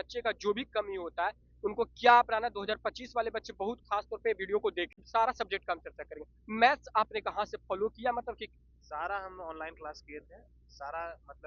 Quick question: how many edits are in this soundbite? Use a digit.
1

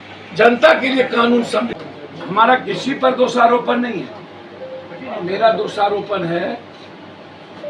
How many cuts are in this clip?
1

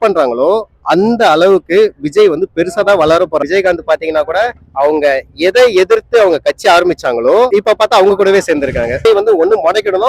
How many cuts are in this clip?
3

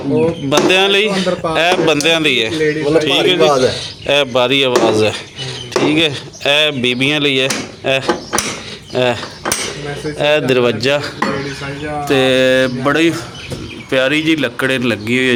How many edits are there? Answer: 0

